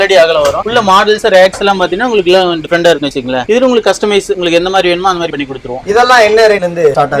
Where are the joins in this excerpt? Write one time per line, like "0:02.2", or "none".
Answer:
none